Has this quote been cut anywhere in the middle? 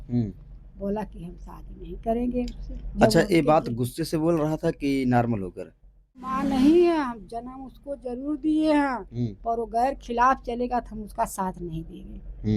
yes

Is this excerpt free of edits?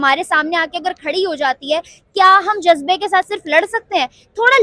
yes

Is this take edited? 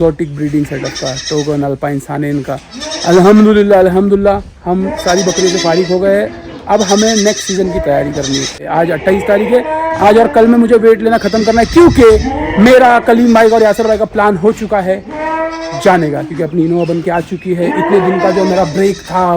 yes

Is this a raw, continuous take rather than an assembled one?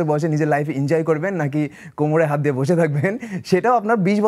yes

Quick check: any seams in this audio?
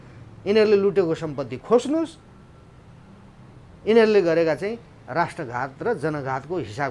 no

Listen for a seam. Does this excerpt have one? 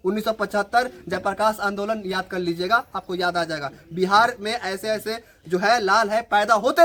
no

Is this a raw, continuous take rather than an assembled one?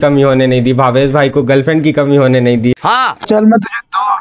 no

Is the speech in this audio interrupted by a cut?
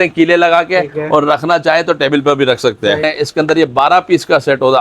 yes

